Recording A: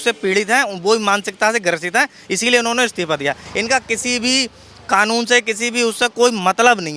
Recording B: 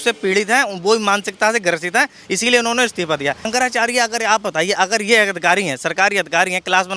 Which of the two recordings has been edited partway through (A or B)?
B